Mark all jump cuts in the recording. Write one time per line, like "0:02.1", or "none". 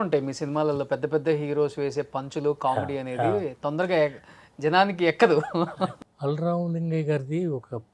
0:05.9